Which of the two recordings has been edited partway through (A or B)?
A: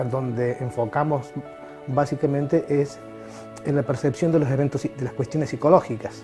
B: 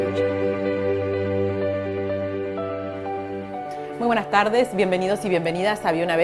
A